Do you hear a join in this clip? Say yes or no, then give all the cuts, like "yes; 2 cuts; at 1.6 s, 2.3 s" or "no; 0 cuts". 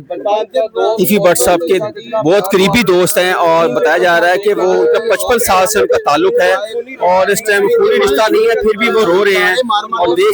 no; 0 cuts